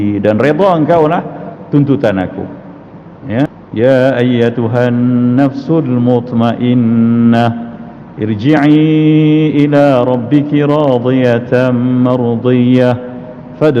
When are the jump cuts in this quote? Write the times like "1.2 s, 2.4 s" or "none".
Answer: 3.5 s